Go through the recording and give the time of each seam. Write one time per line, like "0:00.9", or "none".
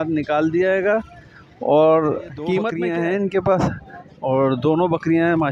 0:02.7